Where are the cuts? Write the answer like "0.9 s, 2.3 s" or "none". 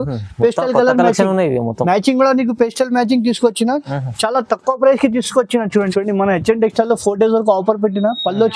5.7 s